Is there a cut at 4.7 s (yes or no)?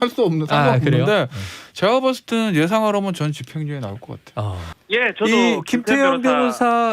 yes